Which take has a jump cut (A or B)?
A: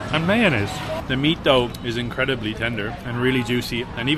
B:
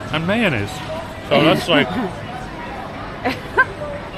A